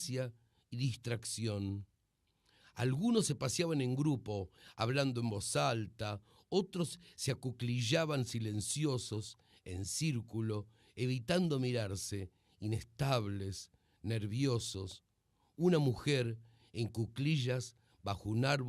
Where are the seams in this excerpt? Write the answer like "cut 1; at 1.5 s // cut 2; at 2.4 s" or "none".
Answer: cut 1; at 15.7 s